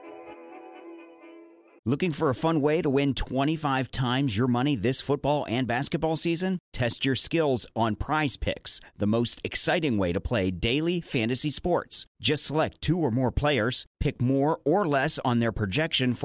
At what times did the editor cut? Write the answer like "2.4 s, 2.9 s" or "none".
1.2 s